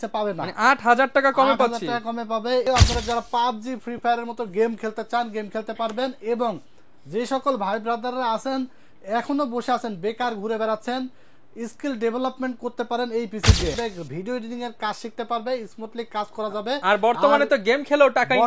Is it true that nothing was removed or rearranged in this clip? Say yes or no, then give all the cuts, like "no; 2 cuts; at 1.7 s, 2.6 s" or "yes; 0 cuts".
no; 2 cuts; at 2.6 s, 13.8 s